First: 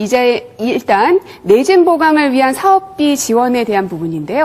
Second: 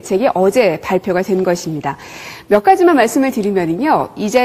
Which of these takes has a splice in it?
second; 1 cut; at 2.7 s

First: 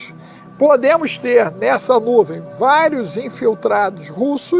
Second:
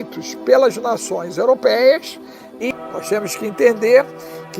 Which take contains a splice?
second; 1 cut; at 2.6 s

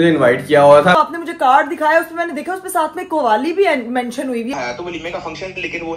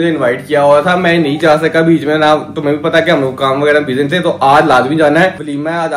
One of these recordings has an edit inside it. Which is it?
first; 2 cuts; at 1.0 s, 4.5 s

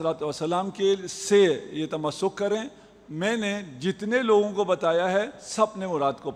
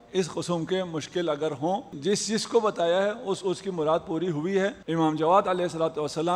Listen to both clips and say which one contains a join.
second; 2 cuts; at 1.9 s, 4.8 s

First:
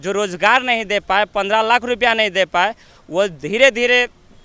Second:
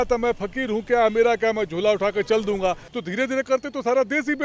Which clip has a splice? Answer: second; 1 cut; at 2.9 s

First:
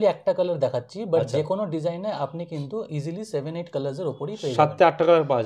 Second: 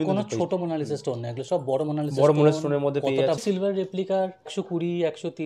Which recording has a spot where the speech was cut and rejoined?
second; 2 cuts; at 3.4 s, 4.5 s

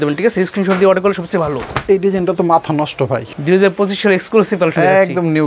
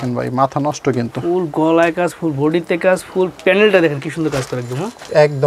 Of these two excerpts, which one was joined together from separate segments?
first; 1 cut; at 3.3 s

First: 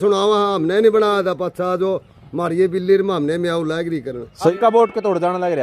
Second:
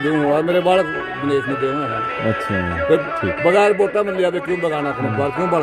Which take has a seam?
first; 1 cut; at 4.5 s

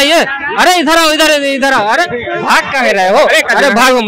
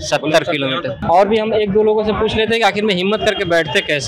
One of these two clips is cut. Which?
second; 1 cut; at 0.9 s

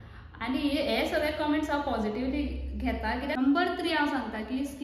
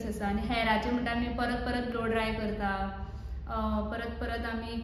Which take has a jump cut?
first; 1 cut; at 3.4 s

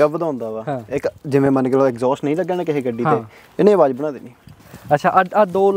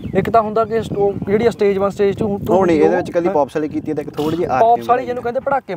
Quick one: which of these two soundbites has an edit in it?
first; 1 cut; at 4.4 s

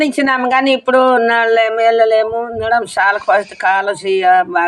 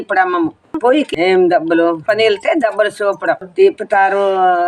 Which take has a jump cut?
second; 3 cuts; at 1.0 s, 2.0 s, 3.5 s

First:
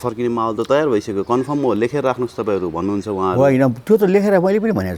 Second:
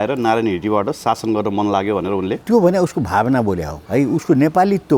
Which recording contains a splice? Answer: second; 2 cuts; at 2.4 s, 3.7 s

